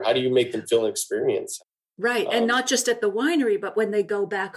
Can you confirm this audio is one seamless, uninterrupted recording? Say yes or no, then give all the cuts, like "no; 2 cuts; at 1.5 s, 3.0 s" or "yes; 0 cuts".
no; 1 cut; at 1.6 s